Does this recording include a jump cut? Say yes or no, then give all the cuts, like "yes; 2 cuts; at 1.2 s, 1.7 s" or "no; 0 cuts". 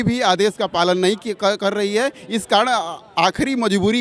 no; 0 cuts